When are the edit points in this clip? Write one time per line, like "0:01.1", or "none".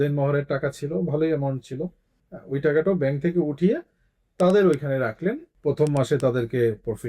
0:05.5